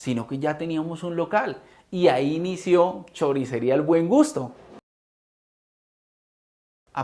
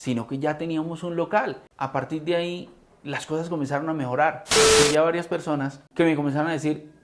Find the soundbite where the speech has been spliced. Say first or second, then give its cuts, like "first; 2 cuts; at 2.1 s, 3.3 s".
second; 2 cuts; at 1.7 s, 4.6 s